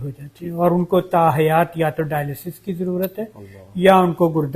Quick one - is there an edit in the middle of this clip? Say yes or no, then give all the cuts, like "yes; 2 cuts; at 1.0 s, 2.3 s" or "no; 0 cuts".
no; 0 cuts